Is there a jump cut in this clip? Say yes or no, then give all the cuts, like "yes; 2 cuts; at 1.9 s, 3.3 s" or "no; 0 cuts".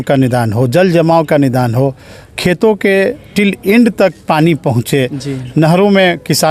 no; 0 cuts